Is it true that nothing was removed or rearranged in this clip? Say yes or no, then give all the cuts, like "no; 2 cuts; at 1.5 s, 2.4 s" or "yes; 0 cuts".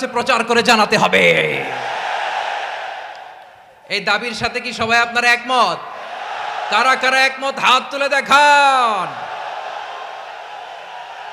yes; 0 cuts